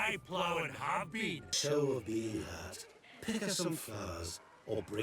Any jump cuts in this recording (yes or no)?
yes